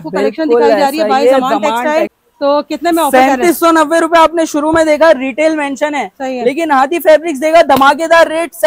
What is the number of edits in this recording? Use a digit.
0